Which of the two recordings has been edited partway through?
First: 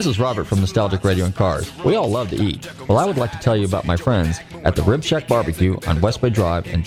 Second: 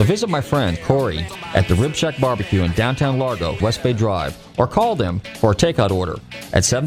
second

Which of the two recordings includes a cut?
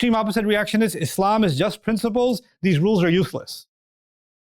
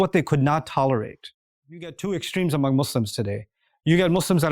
second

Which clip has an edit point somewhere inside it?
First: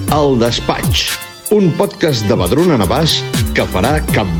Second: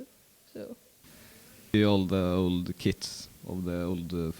second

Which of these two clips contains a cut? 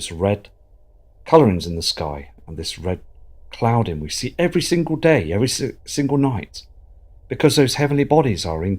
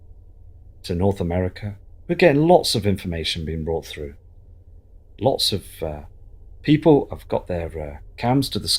first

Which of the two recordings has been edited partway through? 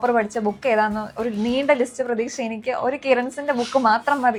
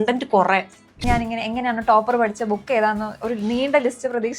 second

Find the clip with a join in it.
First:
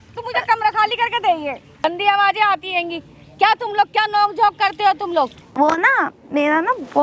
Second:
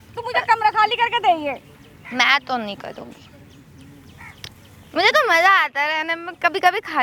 first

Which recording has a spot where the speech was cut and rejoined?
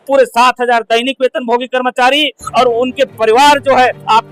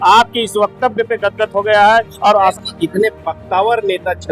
second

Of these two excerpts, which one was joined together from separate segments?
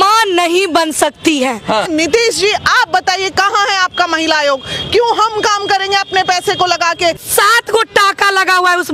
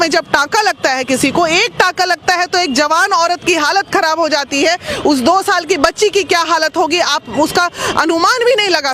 first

